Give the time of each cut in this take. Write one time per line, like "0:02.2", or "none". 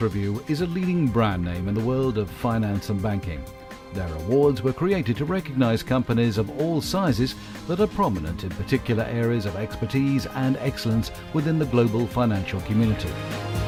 none